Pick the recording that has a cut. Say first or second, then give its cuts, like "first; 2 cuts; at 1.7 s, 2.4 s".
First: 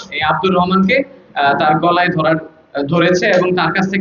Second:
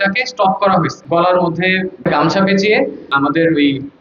second; 3 cuts; at 1.0 s, 1.9 s, 3.1 s